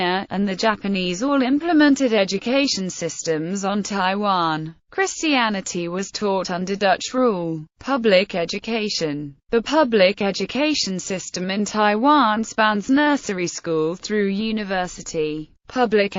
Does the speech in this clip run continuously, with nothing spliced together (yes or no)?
no